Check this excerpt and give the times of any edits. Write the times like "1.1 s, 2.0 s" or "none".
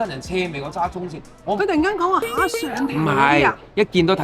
1.6 s